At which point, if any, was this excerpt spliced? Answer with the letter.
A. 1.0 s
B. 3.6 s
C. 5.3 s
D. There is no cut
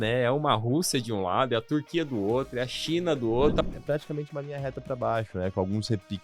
B